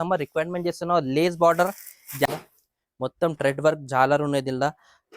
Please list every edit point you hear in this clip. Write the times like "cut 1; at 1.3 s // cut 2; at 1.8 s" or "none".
cut 1; at 2.2 s